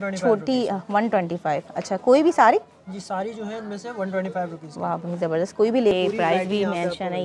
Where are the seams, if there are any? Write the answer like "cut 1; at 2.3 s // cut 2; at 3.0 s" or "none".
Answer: cut 1; at 5.9 s